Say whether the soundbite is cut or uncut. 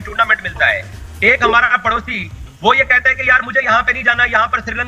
uncut